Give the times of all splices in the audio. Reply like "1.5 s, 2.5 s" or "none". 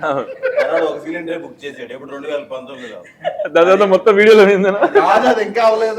none

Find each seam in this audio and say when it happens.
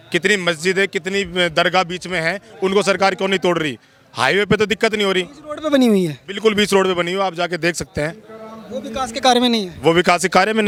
none

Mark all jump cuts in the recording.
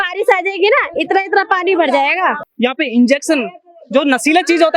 2.5 s

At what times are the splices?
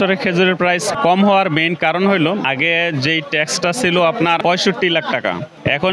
0.9 s, 2.4 s, 4.4 s

